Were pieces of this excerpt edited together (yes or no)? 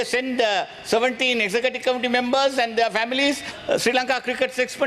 yes